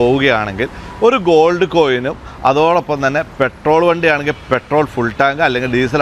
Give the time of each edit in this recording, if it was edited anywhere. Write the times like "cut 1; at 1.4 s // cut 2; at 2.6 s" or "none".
none